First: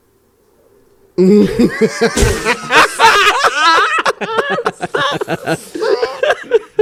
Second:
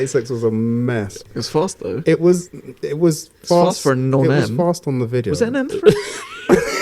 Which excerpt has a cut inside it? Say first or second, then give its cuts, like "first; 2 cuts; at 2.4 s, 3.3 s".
second; 1 cut; at 1.2 s